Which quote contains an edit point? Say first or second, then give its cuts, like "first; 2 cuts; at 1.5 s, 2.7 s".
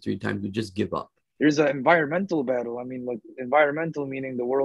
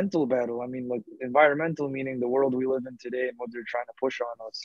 first; 1 cut; at 1.2 s